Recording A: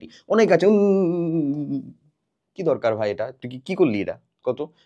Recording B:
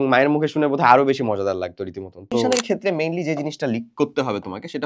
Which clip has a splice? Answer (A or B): B